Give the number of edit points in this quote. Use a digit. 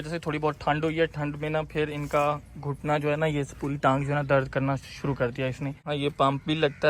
1